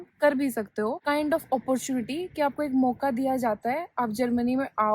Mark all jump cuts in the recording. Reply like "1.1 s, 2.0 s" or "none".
1.0 s